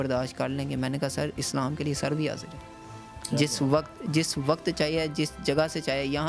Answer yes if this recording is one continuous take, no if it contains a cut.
yes